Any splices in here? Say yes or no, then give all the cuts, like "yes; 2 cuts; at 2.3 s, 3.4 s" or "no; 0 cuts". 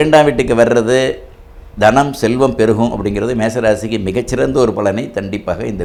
no; 0 cuts